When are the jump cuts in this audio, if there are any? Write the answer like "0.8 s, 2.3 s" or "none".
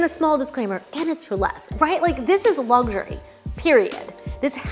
none

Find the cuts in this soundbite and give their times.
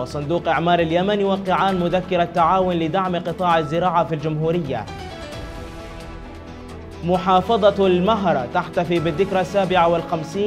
none

